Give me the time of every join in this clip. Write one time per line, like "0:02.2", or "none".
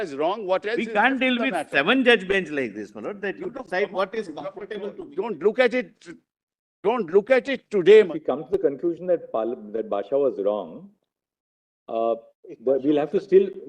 0:05.0
0:08.0